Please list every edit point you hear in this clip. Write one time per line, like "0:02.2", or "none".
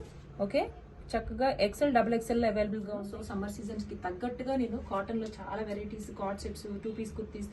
0:02.9

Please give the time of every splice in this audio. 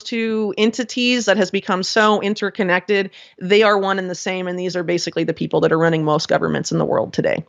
none

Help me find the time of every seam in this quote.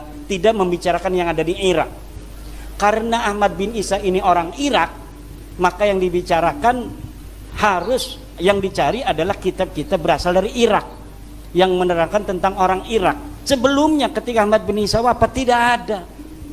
0:13.3

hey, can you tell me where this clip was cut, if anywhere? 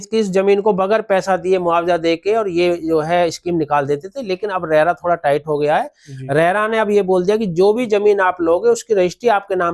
none

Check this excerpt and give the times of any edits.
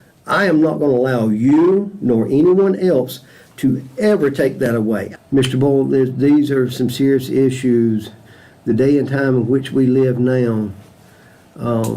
0:05.1

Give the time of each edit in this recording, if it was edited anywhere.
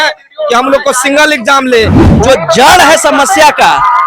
0:02.0

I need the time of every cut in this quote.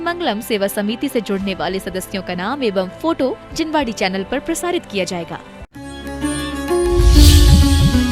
0:05.8

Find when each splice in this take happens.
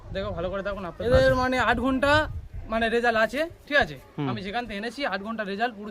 0:01.0

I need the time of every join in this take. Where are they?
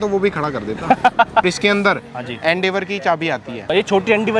0:01.4
0:03.7

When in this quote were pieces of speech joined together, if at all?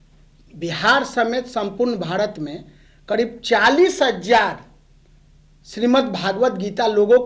none

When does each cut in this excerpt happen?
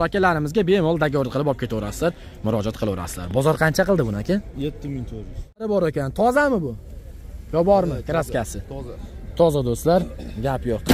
0:05.6

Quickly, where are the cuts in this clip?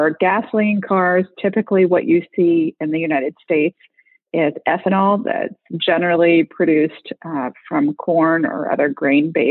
none

